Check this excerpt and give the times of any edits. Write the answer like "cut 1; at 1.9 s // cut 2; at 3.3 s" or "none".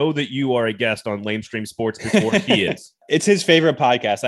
cut 1; at 2.9 s